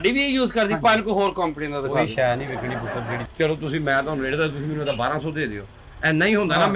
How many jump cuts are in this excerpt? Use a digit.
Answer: 1